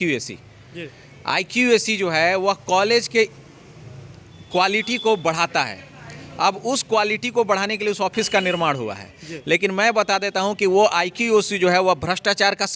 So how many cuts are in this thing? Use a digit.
0